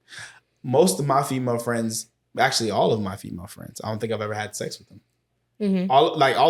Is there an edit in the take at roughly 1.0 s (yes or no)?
no